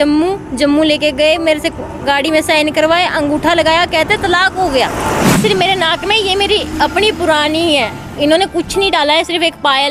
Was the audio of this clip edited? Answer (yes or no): yes